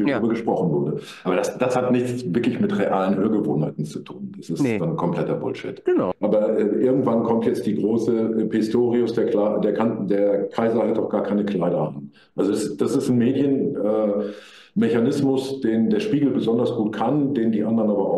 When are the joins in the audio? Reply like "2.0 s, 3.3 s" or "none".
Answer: 6.1 s

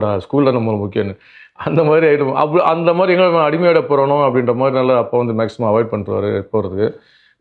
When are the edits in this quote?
none

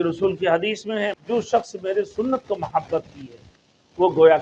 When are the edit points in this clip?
1.1 s

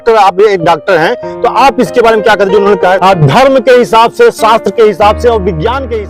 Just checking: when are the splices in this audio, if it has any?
3.0 s

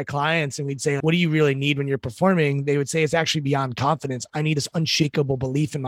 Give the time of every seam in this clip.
1.0 s

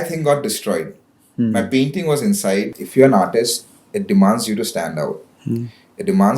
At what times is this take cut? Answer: 2.8 s

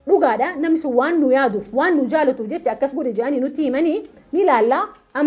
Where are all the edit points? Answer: none

